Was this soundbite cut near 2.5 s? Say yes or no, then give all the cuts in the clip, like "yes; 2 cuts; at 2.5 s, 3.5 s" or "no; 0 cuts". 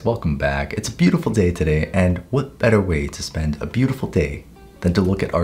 no; 0 cuts